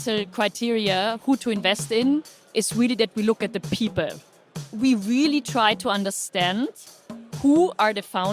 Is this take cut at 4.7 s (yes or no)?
yes